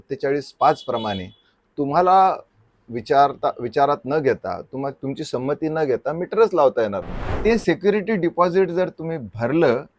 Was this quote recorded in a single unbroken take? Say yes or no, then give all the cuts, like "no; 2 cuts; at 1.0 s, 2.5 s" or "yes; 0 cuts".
no; 1 cut; at 7.3 s